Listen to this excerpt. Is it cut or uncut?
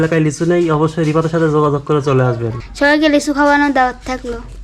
cut